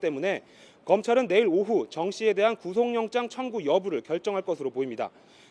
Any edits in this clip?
no; 0 cuts

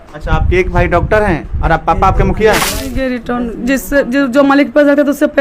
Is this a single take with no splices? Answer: no; 1 cut; at 2.7 s

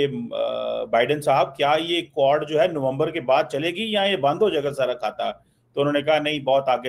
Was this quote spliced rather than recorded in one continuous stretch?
no; 0 cuts

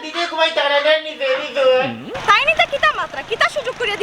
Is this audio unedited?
no; 1 cut; at 2.1 s

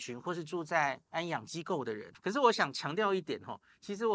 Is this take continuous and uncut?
no; 1 cut; at 2.1 s

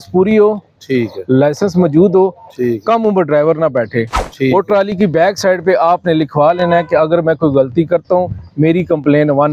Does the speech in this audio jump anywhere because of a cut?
no; 0 cuts

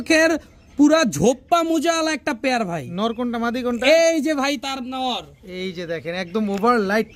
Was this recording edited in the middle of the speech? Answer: no; 0 cuts

